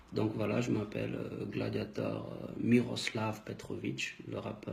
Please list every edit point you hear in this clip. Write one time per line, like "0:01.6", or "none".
0:03.4